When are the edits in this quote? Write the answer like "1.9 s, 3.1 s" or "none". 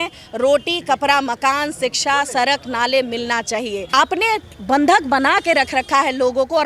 3.9 s